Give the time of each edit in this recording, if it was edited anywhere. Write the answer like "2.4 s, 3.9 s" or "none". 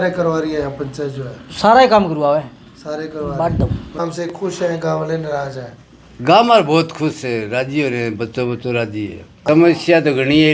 3.9 s, 9.4 s